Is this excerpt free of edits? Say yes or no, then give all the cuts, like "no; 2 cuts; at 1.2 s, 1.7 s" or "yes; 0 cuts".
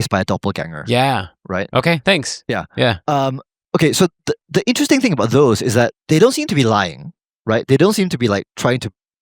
no; 1 cut; at 6.0 s